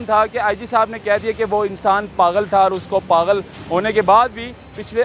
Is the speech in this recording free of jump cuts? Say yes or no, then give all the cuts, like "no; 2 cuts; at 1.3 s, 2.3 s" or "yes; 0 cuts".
yes; 0 cuts